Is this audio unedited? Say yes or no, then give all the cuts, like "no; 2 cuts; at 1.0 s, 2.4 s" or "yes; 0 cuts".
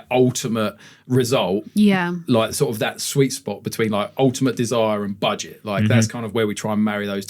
yes; 0 cuts